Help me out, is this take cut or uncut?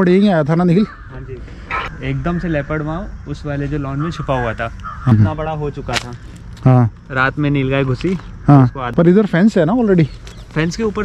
cut